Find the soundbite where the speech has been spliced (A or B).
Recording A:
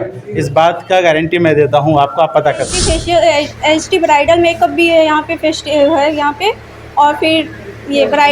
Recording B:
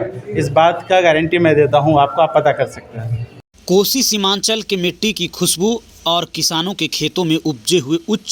A